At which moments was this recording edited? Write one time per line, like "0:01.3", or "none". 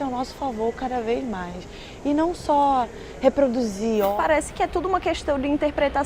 0:04.1